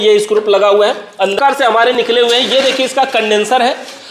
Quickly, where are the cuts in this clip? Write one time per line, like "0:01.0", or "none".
0:01.4